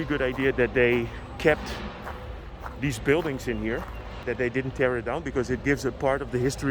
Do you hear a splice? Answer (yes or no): yes